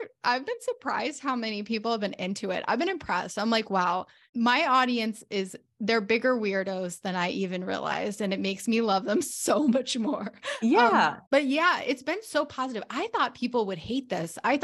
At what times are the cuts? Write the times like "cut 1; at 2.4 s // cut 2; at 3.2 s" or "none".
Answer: cut 1; at 4.2 s // cut 2; at 11.2 s